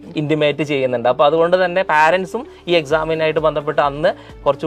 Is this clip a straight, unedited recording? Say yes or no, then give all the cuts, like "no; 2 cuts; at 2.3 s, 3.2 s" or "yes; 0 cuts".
yes; 0 cuts